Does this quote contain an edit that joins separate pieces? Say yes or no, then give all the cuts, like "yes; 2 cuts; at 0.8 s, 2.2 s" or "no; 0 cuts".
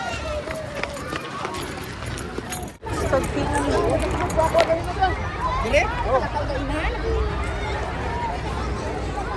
yes; 1 cut; at 2.8 s